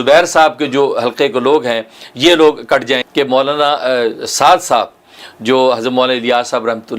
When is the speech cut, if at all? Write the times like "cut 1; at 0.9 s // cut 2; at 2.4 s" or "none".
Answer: cut 1; at 3.1 s